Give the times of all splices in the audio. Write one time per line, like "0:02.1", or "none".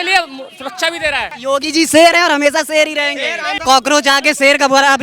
0:01.3
0:03.5